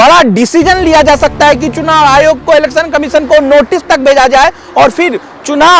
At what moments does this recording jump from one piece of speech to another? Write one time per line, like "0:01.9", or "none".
none